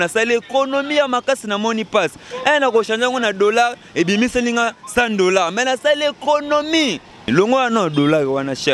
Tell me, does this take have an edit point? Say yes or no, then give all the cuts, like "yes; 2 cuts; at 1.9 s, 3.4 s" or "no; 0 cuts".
yes; 1 cut; at 7.3 s